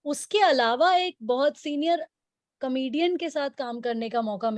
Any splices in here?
no; 0 cuts

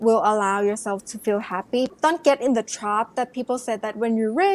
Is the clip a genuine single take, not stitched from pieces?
no; 1 cut; at 1.9 s

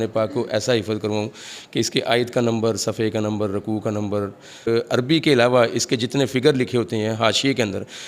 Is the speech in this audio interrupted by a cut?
yes; 1 cut; at 4.6 s

